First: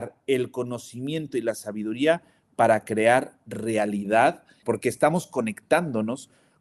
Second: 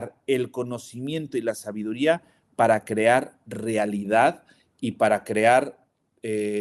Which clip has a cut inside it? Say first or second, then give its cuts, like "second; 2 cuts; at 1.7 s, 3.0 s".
first; 1 cut; at 4.6 s